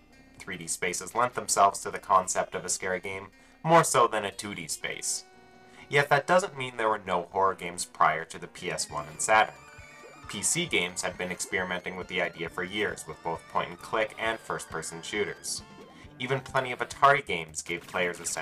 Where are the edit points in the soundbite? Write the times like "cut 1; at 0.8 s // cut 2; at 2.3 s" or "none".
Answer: none

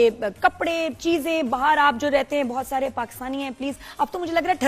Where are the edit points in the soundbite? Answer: none

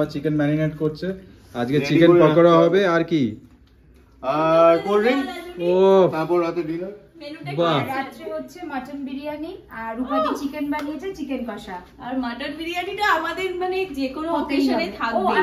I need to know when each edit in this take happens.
none

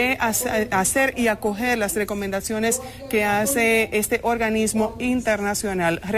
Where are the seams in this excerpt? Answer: cut 1; at 5.2 s

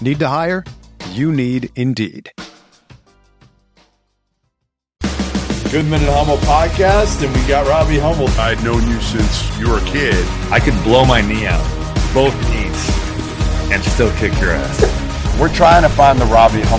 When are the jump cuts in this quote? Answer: cut 1; at 4.8 s

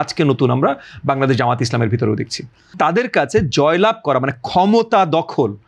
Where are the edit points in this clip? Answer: cut 1; at 2.8 s

